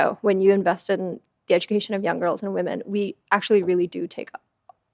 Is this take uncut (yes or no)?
yes